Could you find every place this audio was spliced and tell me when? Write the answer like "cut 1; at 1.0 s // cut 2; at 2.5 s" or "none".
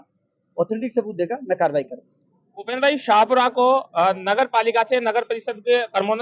none